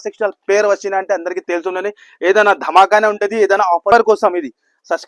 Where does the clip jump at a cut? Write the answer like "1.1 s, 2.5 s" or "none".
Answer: 3.9 s